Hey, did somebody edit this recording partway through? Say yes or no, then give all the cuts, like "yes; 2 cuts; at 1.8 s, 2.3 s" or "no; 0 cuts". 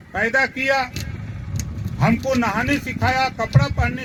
no; 0 cuts